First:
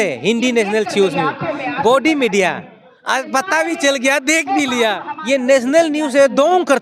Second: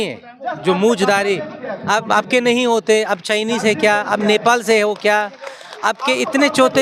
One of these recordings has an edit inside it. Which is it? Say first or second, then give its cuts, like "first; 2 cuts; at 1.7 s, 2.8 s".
first; 1 cut; at 5.1 s